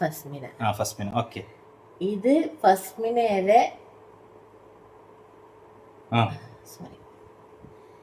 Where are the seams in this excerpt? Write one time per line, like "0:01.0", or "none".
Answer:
none